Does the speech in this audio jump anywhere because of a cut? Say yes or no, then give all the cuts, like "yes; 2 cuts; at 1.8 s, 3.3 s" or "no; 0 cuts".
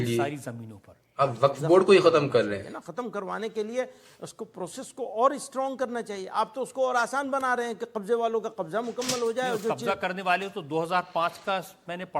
yes; 1 cut; at 2.6 s